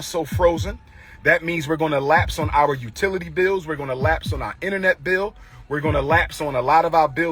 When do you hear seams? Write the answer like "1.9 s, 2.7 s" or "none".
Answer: none